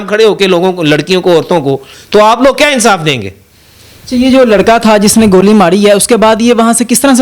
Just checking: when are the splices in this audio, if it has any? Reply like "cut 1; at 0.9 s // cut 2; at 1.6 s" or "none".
none

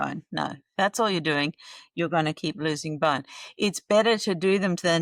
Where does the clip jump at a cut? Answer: none

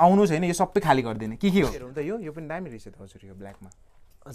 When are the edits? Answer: cut 1; at 1.9 s

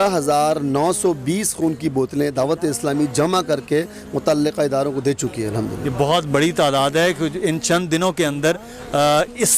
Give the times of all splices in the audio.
none

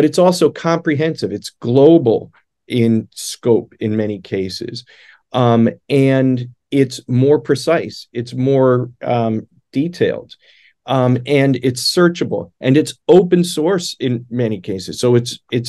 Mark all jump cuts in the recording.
none

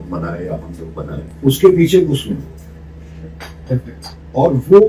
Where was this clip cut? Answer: none

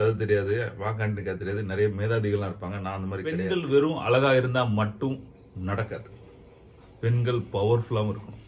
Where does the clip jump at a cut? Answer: cut 1; at 3.4 s

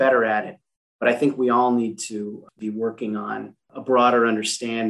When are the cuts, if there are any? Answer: cut 1; at 2.5 s // cut 2; at 3.6 s

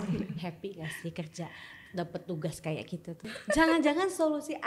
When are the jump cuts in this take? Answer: cut 1; at 3.2 s

